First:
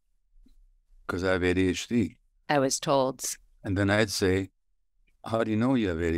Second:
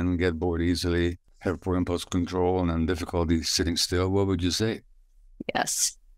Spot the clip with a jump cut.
second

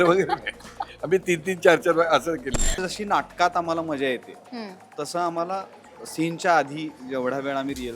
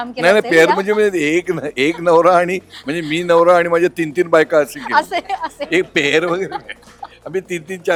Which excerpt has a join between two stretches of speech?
first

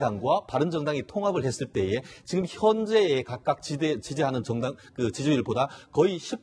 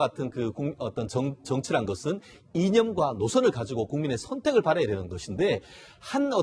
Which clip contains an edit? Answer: second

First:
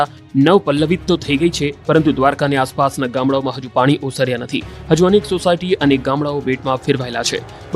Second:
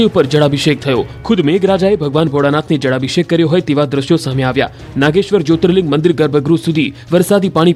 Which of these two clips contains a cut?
first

